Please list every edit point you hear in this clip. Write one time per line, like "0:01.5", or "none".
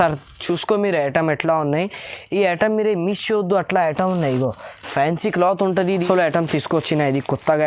0:06.0